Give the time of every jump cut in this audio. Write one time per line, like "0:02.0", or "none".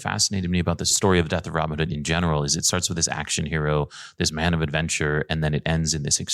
0:00.9